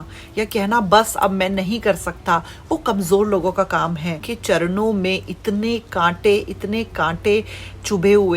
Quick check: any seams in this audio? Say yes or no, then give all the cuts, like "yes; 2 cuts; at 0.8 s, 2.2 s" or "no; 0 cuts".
yes; 1 cut; at 4.3 s